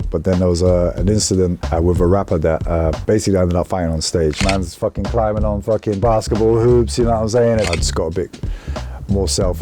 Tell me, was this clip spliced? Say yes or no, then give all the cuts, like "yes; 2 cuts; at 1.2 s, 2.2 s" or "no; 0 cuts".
yes; 2 cuts; at 4.4 s, 7.7 s